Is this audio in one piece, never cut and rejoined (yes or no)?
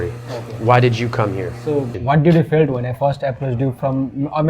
no